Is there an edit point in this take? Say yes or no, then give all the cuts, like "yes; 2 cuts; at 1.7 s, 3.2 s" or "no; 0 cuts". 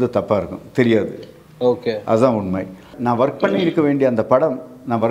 yes; 1 cut; at 2.9 s